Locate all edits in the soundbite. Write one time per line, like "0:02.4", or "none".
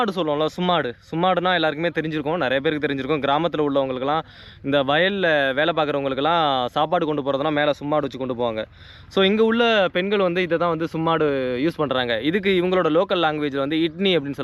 none